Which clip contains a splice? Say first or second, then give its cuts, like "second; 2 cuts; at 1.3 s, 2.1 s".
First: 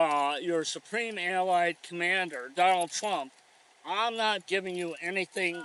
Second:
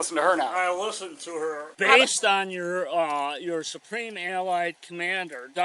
second; 1 cut; at 1.7 s